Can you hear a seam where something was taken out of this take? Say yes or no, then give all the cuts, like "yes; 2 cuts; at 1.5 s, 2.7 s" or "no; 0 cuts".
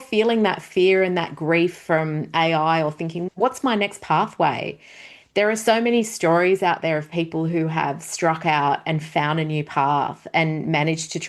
yes; 1 cut; at 3.2 s